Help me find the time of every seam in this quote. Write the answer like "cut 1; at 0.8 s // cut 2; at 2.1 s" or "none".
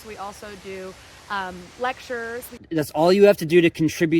cut 1; at 2.6 s